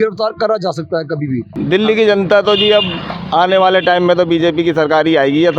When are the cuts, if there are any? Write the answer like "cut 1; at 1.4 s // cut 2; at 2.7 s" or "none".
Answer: cut 1; at 1.5 s

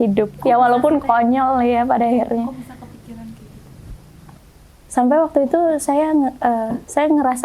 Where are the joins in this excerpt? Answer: cut 1; at 4.2 s

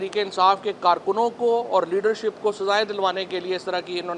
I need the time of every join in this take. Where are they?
none

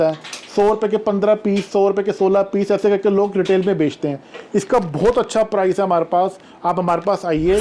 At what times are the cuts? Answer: none

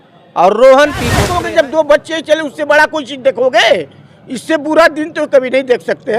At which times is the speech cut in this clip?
cut 1; at 1.2 s

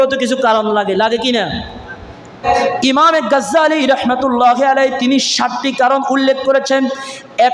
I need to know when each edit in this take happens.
cut 1; at 2.4 s

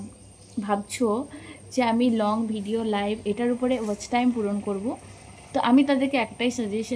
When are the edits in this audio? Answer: none

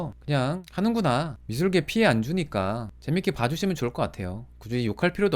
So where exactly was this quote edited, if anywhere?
cut 1; at 1.4 s

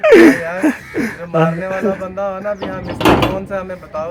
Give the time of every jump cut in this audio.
none

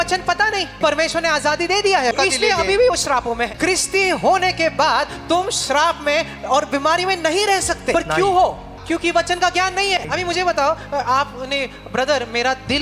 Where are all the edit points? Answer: cut 1; at 0.8 s // cut 2; at 2.1 s // cut 3; at 3.5 s // cut 4; at 7.9 s // cut 5; at 8.8 s // cut 6; at 10.1 s

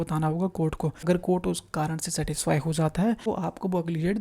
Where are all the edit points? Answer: cut 1; at 1.0 s // cut 2; at 3.3 s

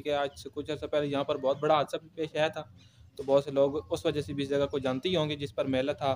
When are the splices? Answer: none

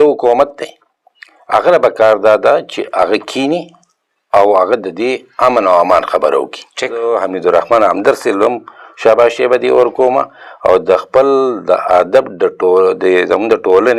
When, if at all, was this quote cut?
cut 1; at 7.0 s

